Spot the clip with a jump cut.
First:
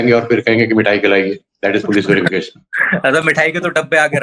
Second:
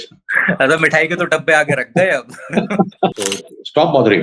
second; 1 cut; at 3.2 s

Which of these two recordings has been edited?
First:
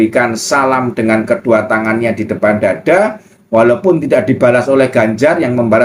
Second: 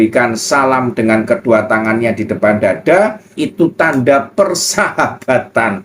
second; 1 cut; at 3.4 s

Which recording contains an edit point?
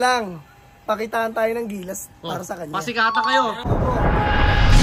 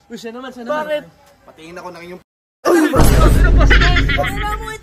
first; 1 cut; at 3.6 s

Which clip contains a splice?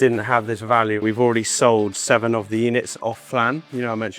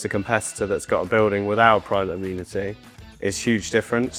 first; 1 cut; at 1.0 s

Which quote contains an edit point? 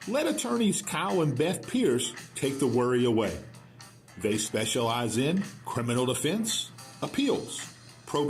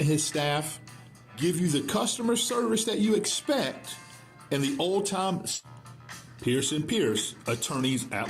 second; 1 cut; at 5.6 s

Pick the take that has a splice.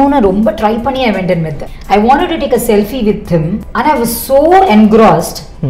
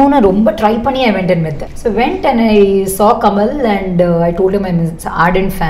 first; 2 cuts; at 1.6 s, 3.6 s

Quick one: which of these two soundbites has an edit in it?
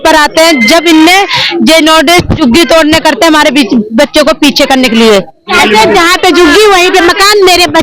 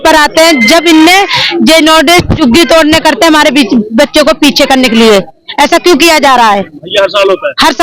first; 1 cut; at 5.5 s

